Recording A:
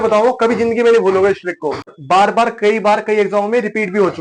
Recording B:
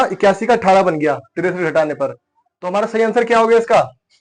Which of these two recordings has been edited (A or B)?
A